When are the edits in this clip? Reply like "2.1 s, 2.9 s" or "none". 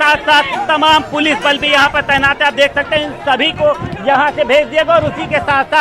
4.7 s